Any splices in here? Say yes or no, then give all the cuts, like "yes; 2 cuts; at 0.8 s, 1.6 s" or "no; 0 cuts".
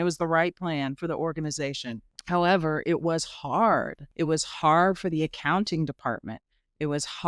yes; 2 cuts; at 2.1 s, 4.0 s